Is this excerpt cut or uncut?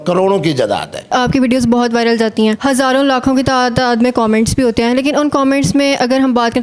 cut